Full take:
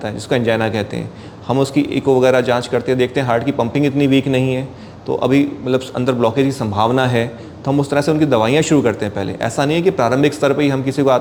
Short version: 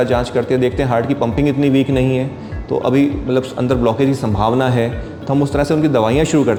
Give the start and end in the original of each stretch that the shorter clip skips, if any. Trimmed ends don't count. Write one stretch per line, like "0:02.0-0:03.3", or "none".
none